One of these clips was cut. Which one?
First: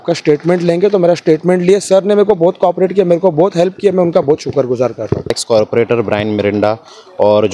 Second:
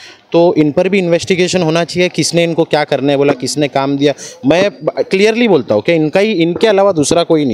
first; 1 cut; at 5.4 s

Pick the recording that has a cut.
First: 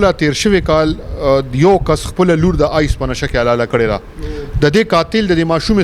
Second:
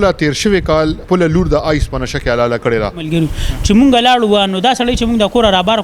second; 2 cuts; at 1.0 s, 3.1 s

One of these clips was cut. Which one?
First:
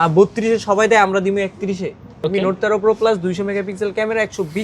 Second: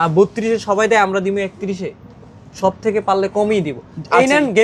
first; 1 cut; at 2.2 s

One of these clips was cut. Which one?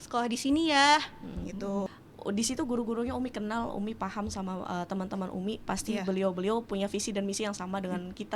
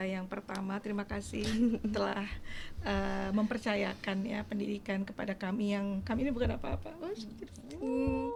first; 1 cut; at 2.0 s

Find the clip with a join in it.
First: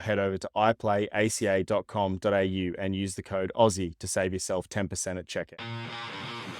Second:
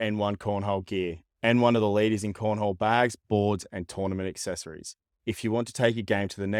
first; 1 cut; at 5.5 s

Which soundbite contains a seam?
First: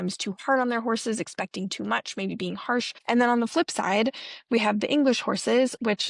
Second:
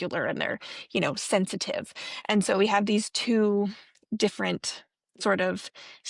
first; 1 cut; at 2.9 s

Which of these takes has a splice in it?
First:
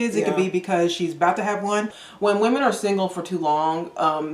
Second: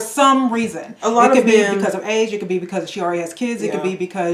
first; 1 cut; at 2.0 s

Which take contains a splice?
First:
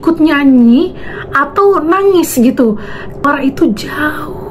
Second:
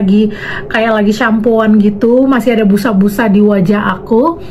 first; 1 cut; at 3.2 s

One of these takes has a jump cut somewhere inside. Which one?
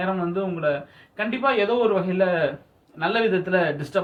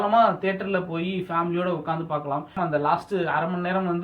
second; 1 cut; at 2.5 s

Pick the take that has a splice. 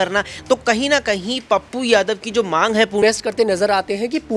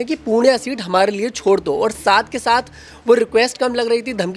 first; 1 cut; at 3.0 s

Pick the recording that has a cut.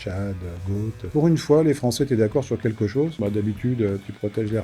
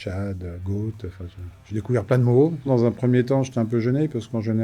first; 2 cuts; at 1.1 s, 3.2 s

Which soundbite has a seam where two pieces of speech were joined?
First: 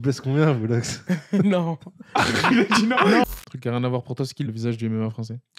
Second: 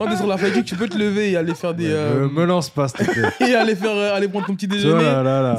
first; 2 cuts; at 3.2 s, 4.5 s

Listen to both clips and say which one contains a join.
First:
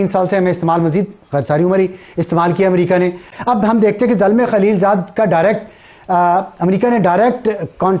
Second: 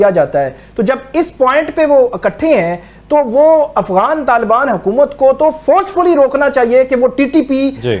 first; 1 cut; at 3.3 s

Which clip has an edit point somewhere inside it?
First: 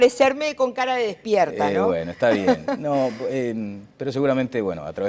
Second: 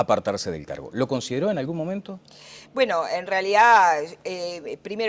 first; 1 cut; at 3.7 s

